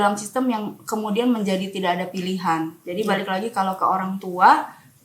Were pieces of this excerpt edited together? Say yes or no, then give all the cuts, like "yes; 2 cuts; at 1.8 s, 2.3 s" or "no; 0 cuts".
no; 0 cuts